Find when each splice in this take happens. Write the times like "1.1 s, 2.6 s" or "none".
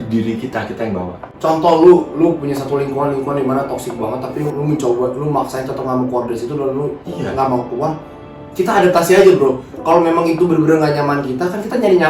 1.2 s